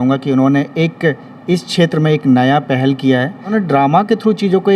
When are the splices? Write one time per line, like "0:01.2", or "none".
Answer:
0:03.4